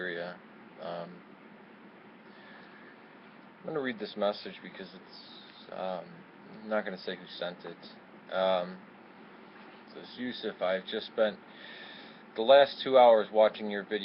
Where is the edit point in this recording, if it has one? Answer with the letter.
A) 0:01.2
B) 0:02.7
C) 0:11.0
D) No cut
C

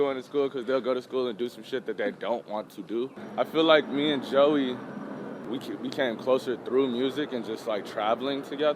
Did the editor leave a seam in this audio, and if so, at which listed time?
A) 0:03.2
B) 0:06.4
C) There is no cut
A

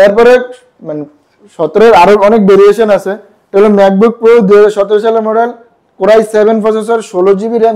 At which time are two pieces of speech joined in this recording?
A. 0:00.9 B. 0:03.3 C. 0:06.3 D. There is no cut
D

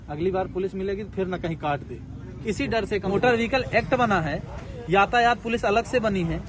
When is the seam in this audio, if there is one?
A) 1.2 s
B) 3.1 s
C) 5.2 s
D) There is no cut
B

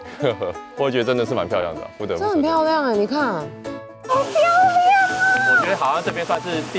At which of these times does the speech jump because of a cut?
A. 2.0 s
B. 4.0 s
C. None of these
B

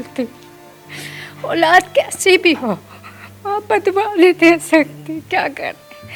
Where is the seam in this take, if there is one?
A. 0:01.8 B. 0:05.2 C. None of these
C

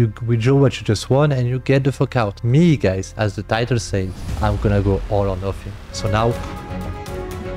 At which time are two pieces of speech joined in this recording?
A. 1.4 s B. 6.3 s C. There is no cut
B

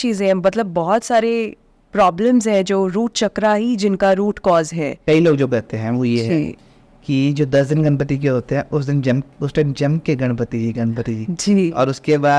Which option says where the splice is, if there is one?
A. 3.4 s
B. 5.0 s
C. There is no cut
B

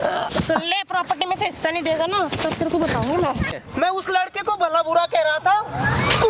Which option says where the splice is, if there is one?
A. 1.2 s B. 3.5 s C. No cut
B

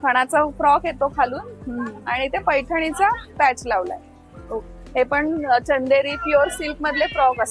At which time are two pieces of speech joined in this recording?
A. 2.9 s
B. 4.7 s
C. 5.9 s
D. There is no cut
B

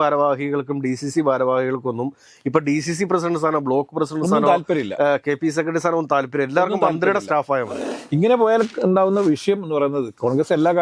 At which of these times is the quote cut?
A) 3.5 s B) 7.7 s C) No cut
B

